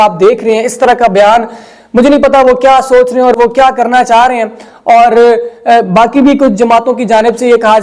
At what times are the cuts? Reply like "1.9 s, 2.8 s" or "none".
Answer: none